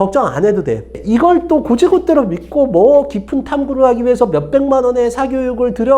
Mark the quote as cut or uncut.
cut